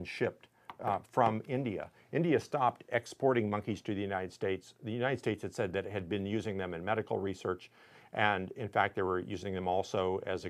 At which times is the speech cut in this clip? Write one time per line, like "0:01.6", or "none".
0:03.4